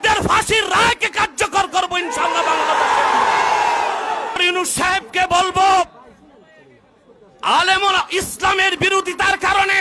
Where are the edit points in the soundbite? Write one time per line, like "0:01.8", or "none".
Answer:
0:04.4

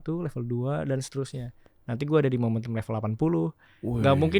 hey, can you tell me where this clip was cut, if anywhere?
none

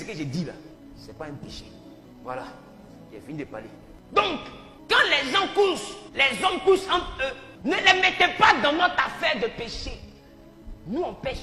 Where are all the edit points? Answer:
none

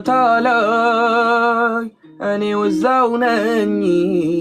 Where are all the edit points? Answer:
0:01.4

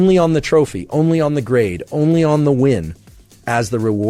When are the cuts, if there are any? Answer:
none

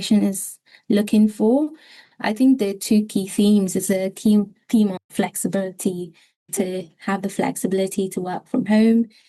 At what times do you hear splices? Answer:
none

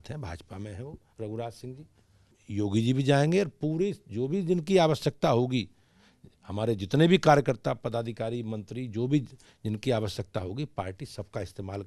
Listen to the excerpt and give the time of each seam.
0:02.3

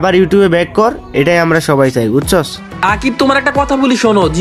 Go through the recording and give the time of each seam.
0:02.6

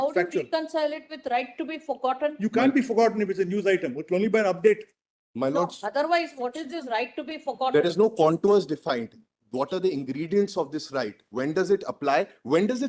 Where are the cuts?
none

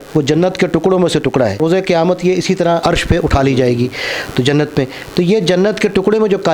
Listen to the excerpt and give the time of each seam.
0:01.6
0:02.8

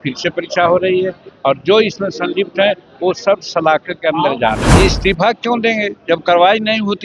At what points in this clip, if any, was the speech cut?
0:04.6

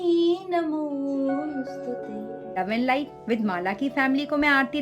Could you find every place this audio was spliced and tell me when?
0:02.6

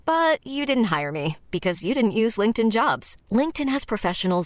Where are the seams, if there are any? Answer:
none

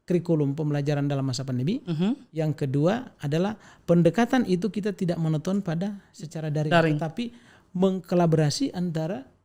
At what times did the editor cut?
none

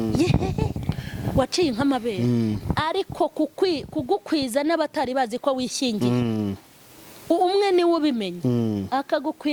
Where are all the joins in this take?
none

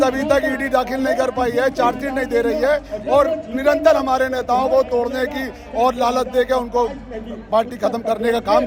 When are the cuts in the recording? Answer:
none

